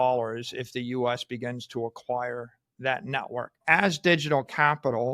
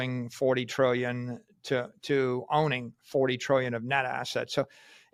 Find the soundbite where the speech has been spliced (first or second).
first